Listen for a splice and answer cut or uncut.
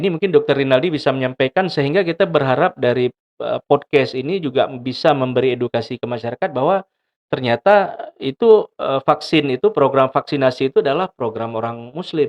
uncut